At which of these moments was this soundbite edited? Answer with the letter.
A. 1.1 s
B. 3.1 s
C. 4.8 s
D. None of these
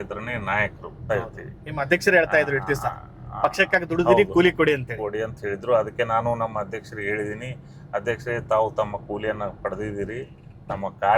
A